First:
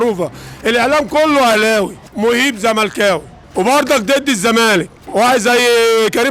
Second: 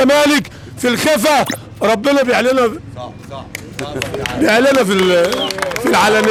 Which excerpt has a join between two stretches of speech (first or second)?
first